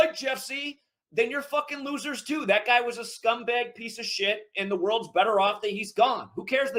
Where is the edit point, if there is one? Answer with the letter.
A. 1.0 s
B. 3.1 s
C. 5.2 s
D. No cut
D